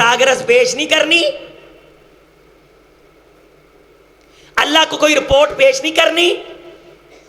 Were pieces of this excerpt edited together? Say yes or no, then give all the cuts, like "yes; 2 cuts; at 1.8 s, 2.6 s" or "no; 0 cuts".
no; 0 cuts